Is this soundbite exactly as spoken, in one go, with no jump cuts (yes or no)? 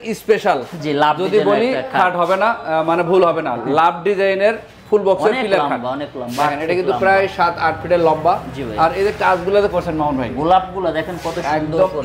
yes